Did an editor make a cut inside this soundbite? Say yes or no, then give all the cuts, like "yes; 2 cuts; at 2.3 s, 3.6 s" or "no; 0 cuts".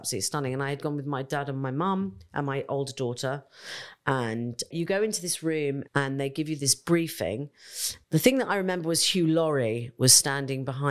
yes; 3 cuts; at 4.7 s, 5.8 s, 7.9 s